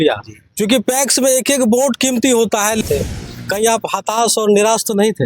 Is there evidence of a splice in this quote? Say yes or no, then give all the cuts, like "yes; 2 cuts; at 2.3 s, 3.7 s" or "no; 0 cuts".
yes; 1 cut; at 2.8 s